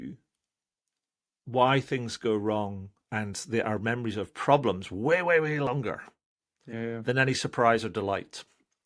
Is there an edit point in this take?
no; 0 cuts

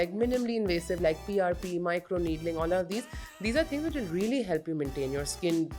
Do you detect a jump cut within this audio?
no; 0 cuts

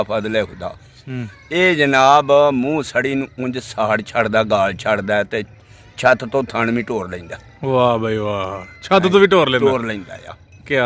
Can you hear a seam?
yes; 1 cut; at 0.9 s

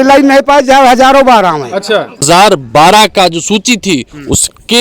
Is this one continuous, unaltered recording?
no; 1 cut; at 2.2 s

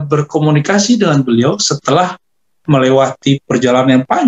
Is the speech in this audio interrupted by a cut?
no; 0 cuts

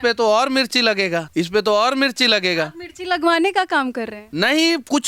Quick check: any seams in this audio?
yes; 1 cut; at 1.3 s

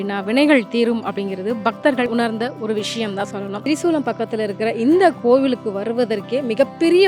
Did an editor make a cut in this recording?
yes; 2 cuts; at 2.1 s, 3.6 s

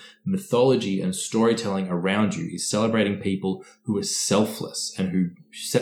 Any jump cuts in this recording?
no; 0 cuts

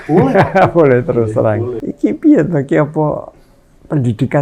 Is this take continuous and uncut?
no; 1 cut; at 1.8 s

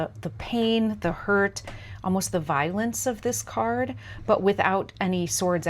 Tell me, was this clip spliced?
no; 0 cuts

